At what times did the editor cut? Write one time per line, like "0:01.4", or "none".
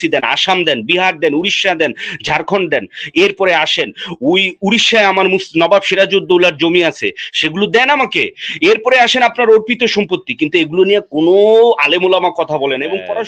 none